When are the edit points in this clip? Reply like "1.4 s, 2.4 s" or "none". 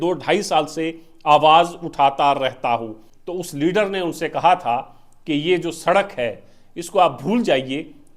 3.0 s